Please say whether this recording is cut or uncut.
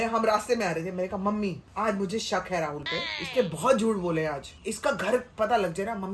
uncut